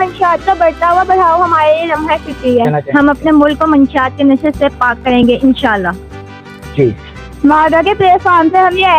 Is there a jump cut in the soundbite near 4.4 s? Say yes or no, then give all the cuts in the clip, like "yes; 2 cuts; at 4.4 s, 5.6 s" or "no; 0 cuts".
no; 1 cut; at 2.8 s